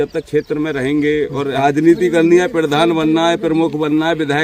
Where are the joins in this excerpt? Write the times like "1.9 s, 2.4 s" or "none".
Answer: 1.6 s